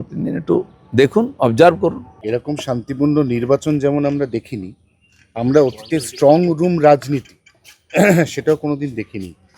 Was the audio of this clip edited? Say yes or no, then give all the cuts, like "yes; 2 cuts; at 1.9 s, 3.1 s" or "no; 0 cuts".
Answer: yes; 1 cut; at 2.1 s